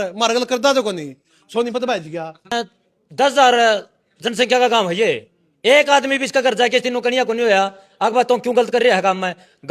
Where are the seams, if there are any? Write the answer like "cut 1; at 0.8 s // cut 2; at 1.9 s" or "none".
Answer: cut 1; at 2.5 s